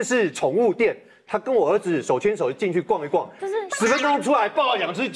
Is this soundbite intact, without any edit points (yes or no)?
yes